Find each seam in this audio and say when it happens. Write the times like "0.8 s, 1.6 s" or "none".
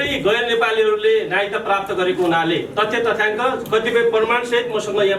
none